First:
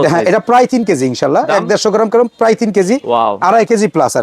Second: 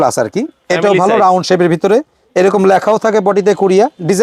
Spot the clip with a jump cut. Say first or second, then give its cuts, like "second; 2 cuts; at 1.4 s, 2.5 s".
first; 1 cut; at 3.0 s